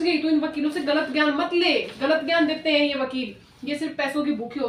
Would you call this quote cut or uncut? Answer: uncut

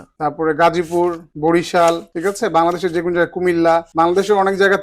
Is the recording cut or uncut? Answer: cut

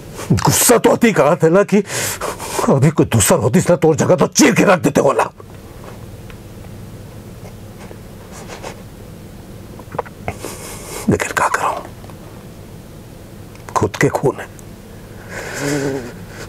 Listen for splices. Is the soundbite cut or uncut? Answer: uncut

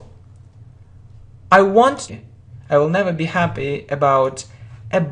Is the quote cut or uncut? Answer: uncut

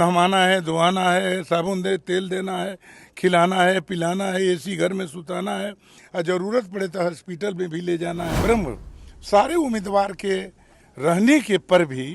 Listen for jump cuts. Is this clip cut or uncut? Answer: cut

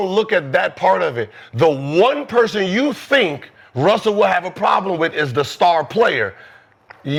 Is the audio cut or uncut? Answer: uncut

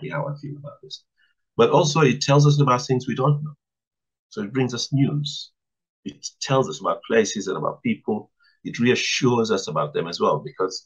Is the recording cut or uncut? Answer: uncut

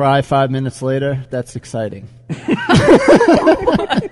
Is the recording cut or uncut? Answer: cut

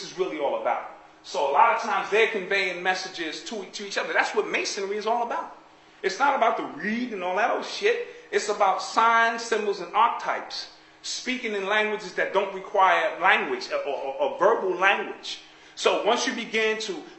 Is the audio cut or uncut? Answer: cut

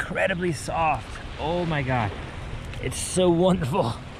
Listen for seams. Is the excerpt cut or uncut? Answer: uncut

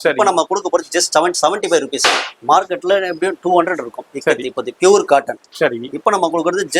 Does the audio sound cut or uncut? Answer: cut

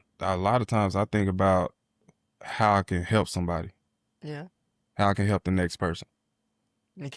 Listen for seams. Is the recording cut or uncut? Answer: uncut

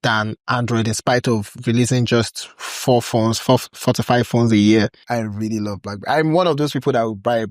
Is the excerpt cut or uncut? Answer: cut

